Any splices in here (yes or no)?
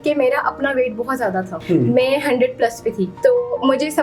yes